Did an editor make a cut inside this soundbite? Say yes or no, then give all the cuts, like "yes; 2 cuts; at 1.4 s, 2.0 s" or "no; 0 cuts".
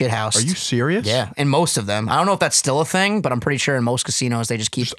no; 0 cuts